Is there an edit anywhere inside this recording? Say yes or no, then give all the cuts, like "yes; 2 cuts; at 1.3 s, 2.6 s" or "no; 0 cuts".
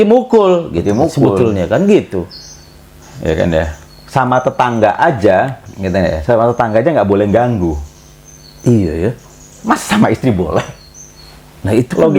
no; 0 cuts